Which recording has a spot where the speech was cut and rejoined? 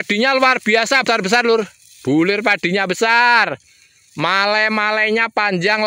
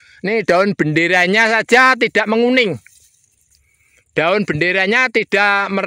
first; 1 cut; at 1.0 s

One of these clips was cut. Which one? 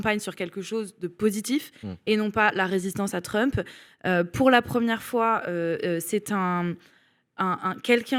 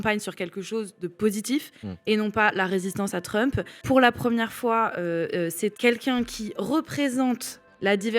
second; 2 cuts; at 3.8 s, 5.8 s

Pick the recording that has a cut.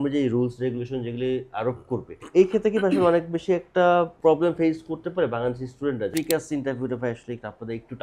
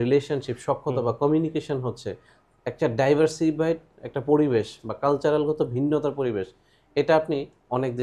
first; 3 cuts; at 2.2 s, 4.1 s, 6.1 s

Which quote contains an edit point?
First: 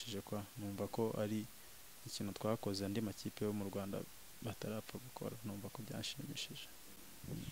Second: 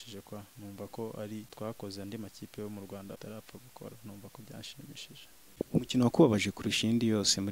second; 3 cuts; at 1.5 s, 3.2 s, 5.5 s

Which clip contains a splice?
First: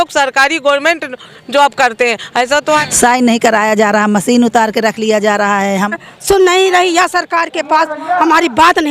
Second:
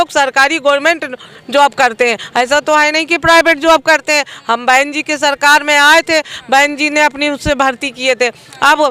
first; 2 cuts; at 2.9 s, 5.9 s

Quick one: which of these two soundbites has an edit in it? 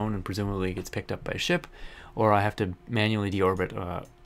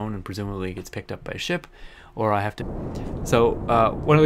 first; 1 cut; at 2.5 s

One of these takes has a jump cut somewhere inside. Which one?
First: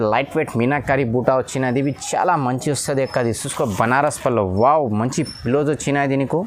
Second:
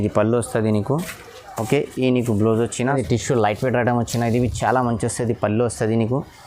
second; 1 cut; at 2.9 s

